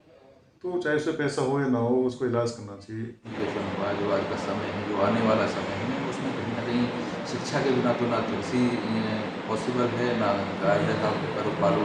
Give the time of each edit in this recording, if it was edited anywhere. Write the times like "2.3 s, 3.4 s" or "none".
3.3 s